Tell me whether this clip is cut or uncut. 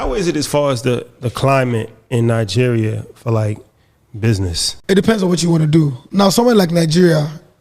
cut